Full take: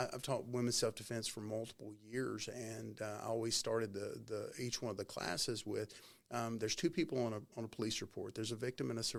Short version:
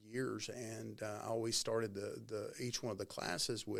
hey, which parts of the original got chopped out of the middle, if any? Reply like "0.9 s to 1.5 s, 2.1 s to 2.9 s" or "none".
none